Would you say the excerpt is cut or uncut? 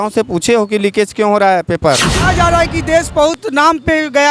cut